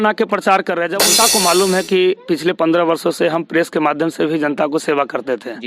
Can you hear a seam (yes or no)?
yes